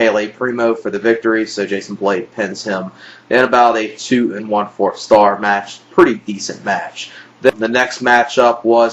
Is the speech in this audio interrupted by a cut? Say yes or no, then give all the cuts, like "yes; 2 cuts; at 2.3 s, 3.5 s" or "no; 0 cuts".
no; 0 cuts